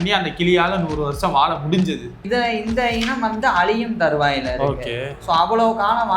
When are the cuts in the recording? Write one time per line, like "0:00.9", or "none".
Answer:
0:02.1